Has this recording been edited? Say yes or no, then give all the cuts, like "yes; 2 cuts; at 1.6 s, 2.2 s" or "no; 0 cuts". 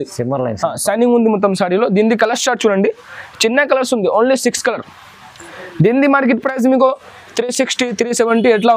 no; 0 cuts